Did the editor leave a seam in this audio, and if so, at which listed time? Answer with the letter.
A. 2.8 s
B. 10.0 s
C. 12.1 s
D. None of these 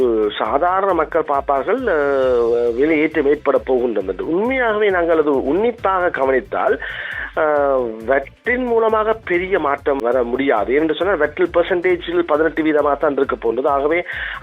B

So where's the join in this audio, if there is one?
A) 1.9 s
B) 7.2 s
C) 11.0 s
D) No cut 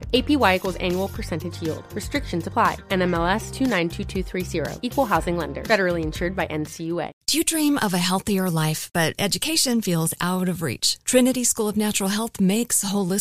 B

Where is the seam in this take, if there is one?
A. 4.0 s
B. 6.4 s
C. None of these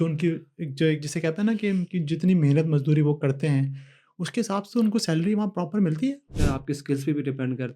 B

